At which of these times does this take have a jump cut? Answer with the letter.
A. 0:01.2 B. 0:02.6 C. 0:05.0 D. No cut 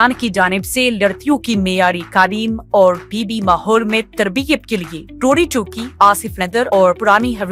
D